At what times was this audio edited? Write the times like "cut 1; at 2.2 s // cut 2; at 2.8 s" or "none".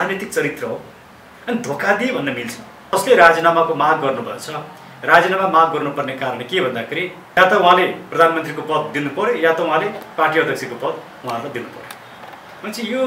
cut 1; at 2.9 s // cut 2; at 7.4 s